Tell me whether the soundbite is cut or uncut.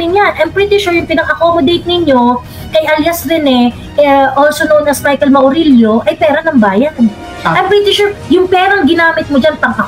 uncut